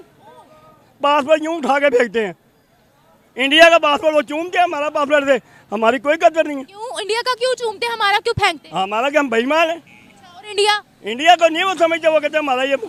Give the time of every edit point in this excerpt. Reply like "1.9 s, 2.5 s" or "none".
none

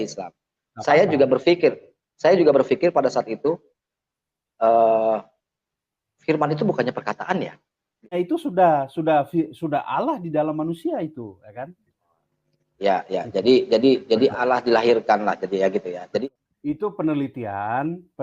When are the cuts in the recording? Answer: 8.1 s, 16.2 s

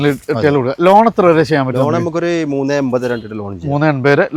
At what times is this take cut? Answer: none

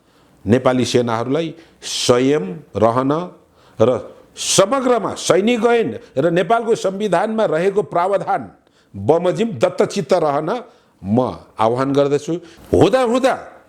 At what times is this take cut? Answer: 12.5 s

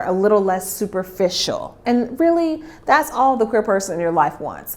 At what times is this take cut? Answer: 1.8 s

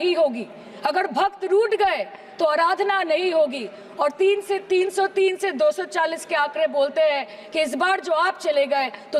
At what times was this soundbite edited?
none

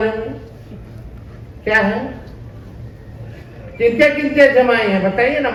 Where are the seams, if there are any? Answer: none

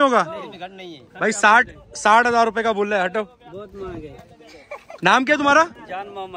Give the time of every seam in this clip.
none

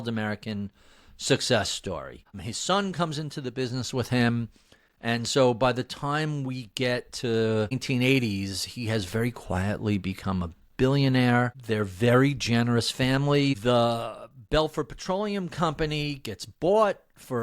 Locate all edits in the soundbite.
13.6 s

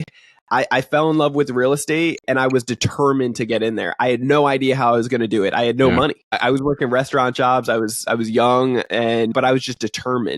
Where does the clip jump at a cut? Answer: 6.4 s, 9.3 s

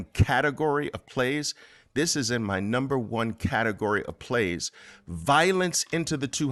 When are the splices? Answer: none

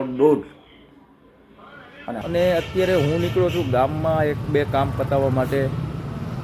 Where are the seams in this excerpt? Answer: 2.2 s

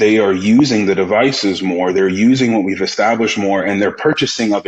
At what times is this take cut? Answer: none

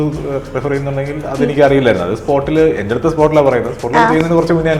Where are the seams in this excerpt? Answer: none

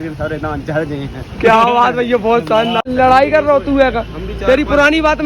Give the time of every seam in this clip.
2.9 s

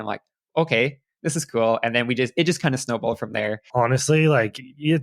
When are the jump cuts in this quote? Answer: 3.6 s

